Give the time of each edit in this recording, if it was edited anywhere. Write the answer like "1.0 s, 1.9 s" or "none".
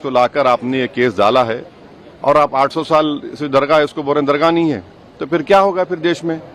none